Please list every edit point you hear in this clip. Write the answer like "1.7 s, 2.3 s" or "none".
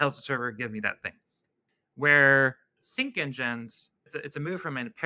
none